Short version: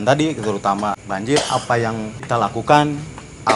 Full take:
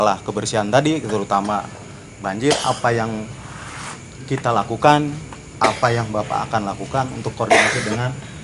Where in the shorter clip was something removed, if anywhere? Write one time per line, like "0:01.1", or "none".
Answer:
0:01.0
0:02.2